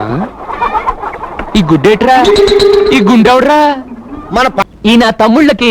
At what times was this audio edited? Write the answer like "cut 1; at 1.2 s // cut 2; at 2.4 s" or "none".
cut 1; at 4.6 s